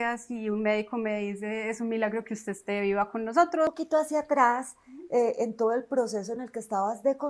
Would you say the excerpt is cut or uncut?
cut